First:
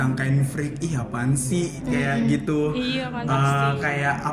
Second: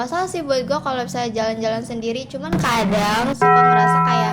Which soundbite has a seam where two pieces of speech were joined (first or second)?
second